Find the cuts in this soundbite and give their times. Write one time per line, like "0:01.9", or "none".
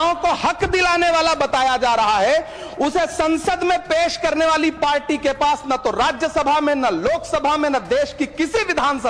none